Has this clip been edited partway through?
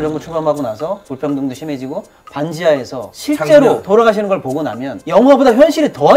no; 0 cuts

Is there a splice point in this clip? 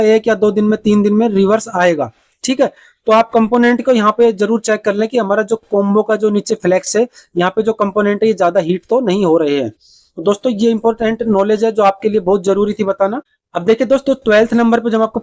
no; 0 cuts

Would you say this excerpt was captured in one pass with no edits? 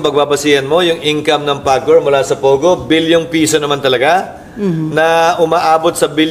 yes; 0 cuts

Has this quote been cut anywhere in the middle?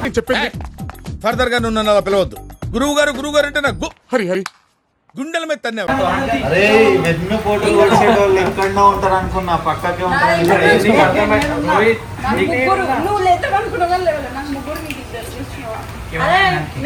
no; 0 cuts

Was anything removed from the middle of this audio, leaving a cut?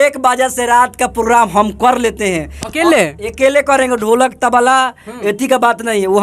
no; 0 cuts

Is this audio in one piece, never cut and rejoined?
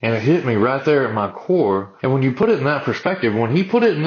no; 1 cut; at 1.9 s

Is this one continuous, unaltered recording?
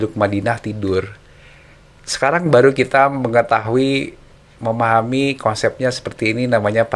yes; 0 cuts

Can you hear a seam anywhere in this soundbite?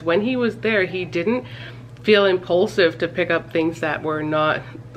no; 0 cuts

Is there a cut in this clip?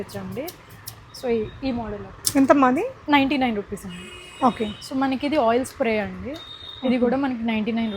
no; 0 cuts

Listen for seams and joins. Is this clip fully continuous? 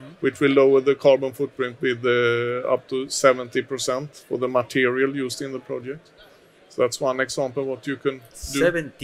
yes; 0 cuts

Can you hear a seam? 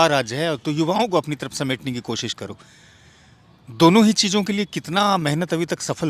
no; 0 cuts

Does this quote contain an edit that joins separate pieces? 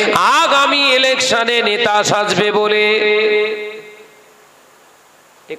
no; 0 cuts

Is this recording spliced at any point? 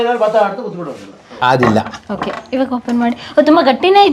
yes; 1 cut; at 1.3 s

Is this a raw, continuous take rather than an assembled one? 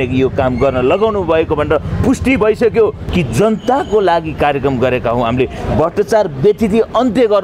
no; 1 cut; at 3.0 s

